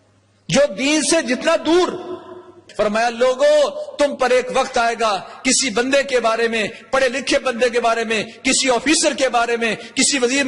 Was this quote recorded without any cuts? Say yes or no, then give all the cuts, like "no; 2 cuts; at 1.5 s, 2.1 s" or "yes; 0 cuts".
no; 1 cut; at 2.6 s